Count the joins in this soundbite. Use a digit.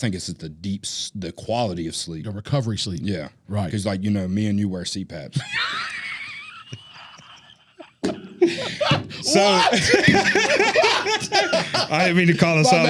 0